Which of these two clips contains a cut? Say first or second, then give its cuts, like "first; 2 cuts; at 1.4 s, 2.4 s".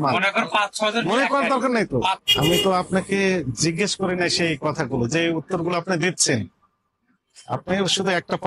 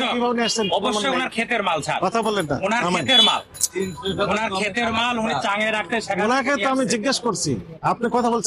first; 1 cut; at 2.2 s